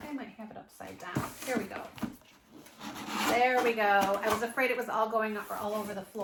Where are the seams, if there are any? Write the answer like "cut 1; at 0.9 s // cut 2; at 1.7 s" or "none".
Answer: none